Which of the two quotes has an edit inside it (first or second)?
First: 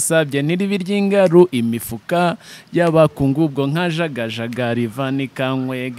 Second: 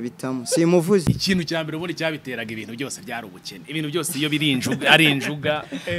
second